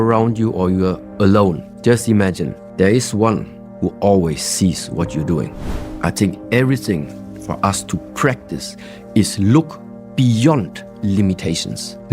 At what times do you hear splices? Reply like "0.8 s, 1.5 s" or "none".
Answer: 2.6 s, 5.9 s